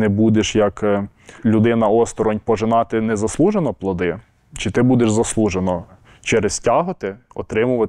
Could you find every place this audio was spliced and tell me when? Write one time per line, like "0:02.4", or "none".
0:01.4
0:06.0